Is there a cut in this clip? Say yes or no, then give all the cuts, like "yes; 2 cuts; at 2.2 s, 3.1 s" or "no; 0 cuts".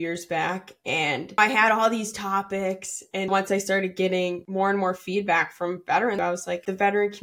yes; 4 cuts; at 1.4 s, 3.3 s, 4.4 s, 6.5 s